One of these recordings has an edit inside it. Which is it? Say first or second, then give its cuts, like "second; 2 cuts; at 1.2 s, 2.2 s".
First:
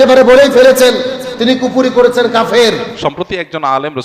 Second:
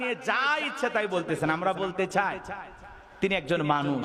first; 1 cut; at 2.9 s